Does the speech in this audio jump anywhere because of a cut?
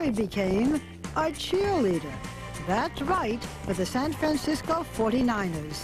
no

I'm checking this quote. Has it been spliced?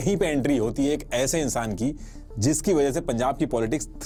no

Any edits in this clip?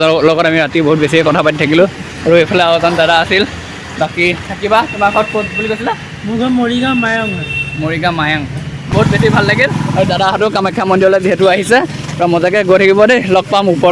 yes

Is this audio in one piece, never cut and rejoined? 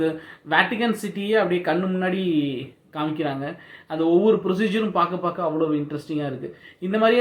yes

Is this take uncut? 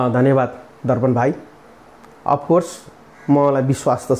yes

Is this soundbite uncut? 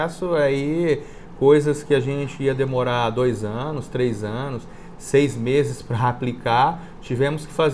yes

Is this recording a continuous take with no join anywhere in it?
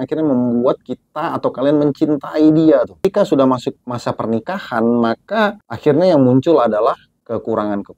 no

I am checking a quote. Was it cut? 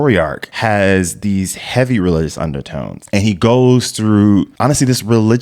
yes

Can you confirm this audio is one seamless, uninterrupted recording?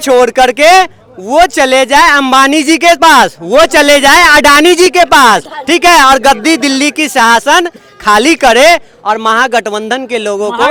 yes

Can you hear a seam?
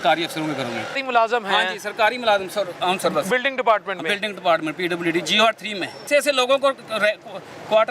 yes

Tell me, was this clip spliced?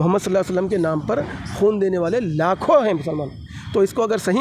no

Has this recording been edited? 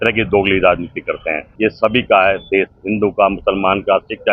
yes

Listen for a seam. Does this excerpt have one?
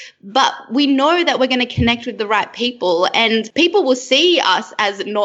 no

